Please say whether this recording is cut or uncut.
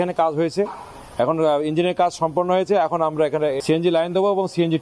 uncut